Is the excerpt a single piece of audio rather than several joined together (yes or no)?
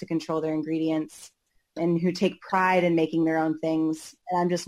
no